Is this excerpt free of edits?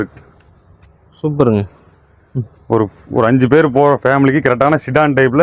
yes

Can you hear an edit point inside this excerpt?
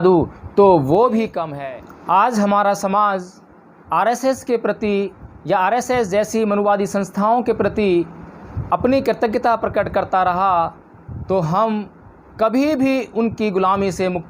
yes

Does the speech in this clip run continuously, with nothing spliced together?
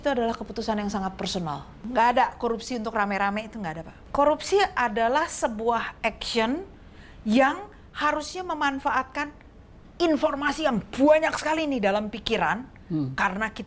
no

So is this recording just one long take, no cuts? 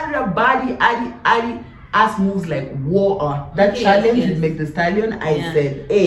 yes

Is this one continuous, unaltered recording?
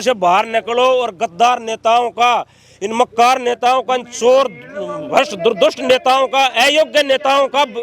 yes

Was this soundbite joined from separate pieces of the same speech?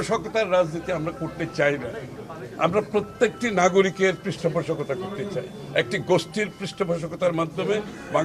no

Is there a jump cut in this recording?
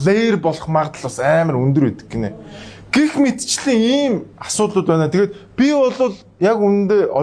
no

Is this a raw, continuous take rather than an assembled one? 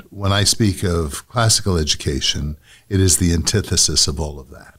yes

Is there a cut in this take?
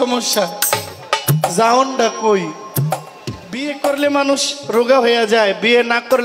yes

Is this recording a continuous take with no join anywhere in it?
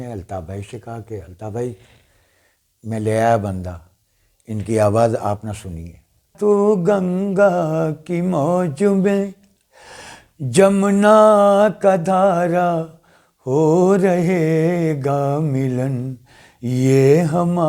no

